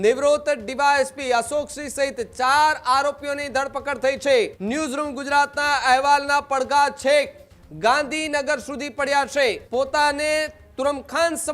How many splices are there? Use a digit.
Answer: 2